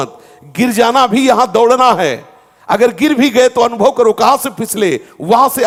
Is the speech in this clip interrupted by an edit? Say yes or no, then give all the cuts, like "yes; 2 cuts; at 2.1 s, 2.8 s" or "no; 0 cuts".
no; 0 cuts